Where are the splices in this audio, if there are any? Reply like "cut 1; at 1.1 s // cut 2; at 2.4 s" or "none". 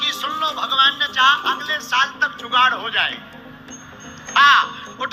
none

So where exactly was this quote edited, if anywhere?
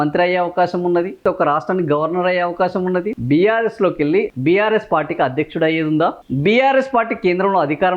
cut 1; at 1.2 s // cut 2; at 3.1 s // cut 3; at 4.3 s // cut 4; at 6.3 s

